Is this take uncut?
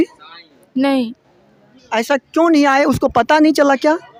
yes; 0 cuts

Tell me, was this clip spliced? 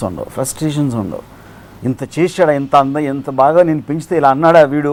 no; 0 cuts

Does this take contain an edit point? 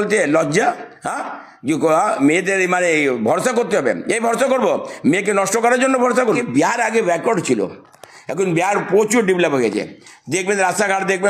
yes; 1 cut; at 6.2 s

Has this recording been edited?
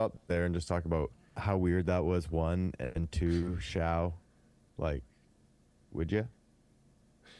yes; 1 cut; at 1.3 s

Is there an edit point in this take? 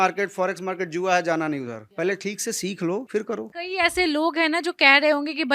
yes; 1 cut; at 3.6 s

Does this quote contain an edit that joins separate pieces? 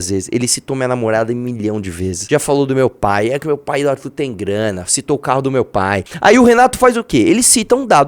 yes; 2 cuts; at 2.2 s, 6.1 s

